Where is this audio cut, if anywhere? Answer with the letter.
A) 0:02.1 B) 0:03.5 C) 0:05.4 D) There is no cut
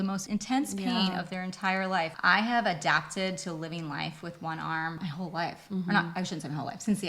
A